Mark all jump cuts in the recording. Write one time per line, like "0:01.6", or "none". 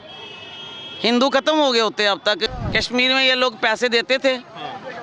0:02.4